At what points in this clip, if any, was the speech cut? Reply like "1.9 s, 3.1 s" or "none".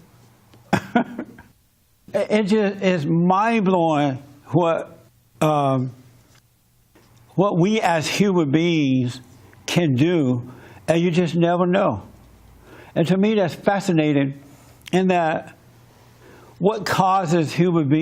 none